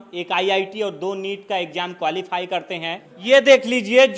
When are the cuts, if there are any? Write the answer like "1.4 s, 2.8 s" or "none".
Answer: 3.0 s